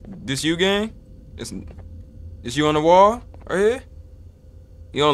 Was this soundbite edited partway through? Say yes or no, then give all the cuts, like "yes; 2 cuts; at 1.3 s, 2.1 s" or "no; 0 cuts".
no; 0 cuts